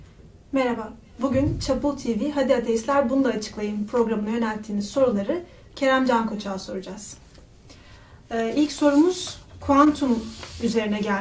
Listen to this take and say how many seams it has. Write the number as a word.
zero